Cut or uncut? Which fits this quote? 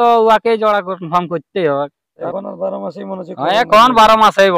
cut